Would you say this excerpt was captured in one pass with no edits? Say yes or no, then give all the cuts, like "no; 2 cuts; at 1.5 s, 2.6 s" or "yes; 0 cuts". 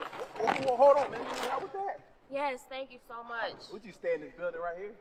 yes; 0 cuts